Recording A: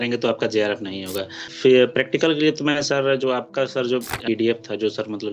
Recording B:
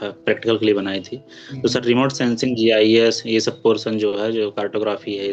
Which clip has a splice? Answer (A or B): A